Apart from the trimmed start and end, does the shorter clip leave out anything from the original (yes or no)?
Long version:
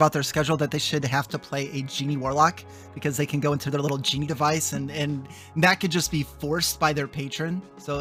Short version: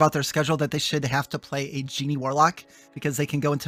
no